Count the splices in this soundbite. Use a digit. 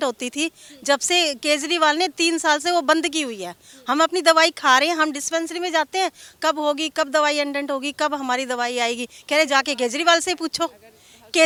0